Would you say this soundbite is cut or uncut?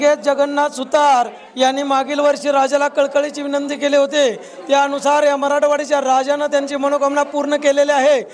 uncut